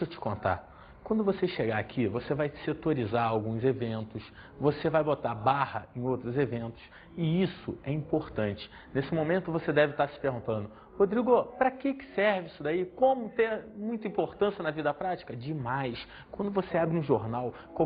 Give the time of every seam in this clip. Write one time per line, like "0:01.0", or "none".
none